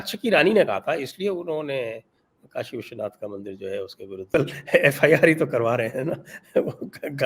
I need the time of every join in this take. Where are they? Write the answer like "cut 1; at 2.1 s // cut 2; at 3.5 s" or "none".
cut 1; at 4.3 s